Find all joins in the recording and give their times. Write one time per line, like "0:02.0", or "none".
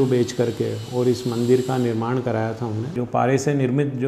0:02.9

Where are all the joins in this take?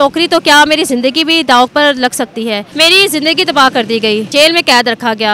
0:02.6
0:04.3

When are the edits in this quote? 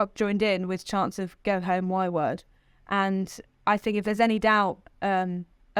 none

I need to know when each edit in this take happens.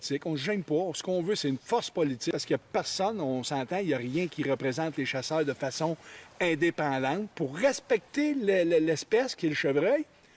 0:02.3
0:07.3

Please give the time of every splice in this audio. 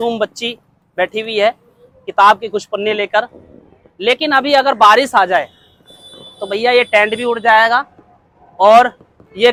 none

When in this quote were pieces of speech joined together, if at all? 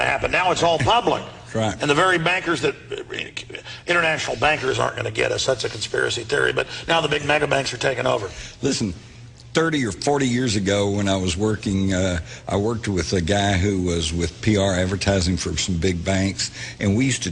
0:06.6

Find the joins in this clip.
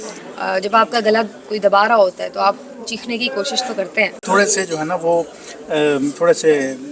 0:04.2

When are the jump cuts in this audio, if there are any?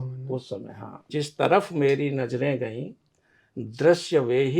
0:01.1

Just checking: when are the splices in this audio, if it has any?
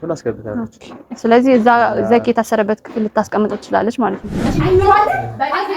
0:04.4

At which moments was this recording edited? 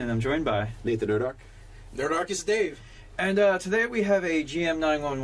0:01.0

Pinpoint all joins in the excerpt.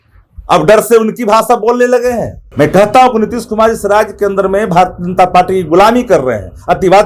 0:02.4

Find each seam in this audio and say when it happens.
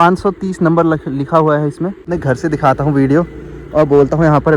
0:02.1

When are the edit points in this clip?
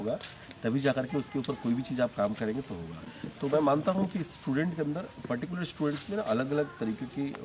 none

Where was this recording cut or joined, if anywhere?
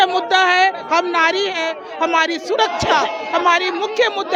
none

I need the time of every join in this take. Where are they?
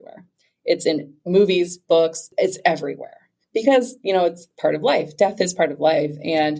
0:02.3

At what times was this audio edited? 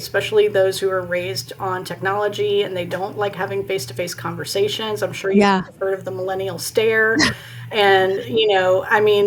none

